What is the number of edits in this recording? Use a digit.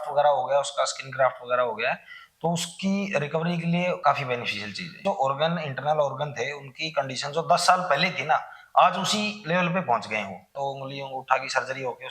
3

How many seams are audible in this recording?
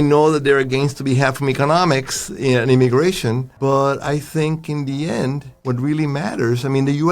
2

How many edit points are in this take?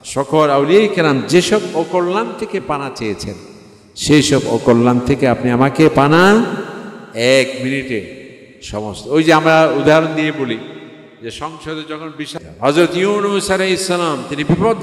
1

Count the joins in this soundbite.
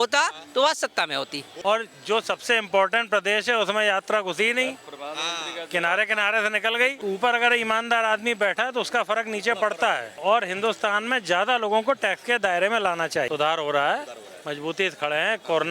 3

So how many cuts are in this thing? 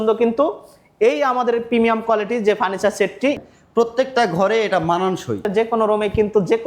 2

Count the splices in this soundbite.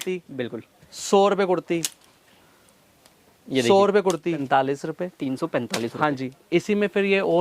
1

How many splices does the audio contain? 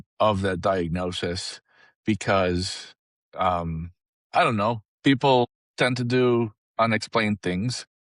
1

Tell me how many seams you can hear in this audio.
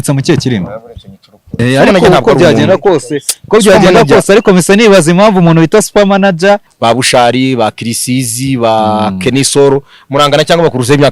2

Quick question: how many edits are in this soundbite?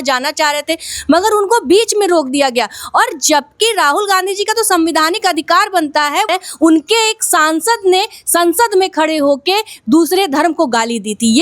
1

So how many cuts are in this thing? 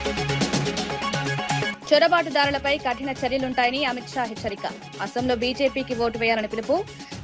1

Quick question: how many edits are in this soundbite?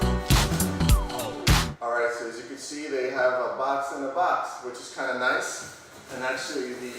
1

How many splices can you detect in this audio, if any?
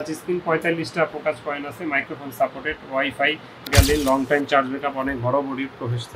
1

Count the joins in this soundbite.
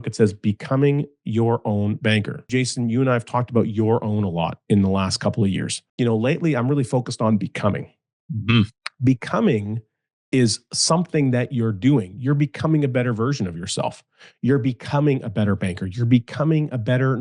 2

